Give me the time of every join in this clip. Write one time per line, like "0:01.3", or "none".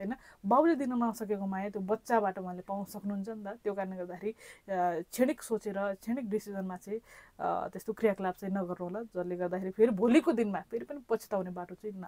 none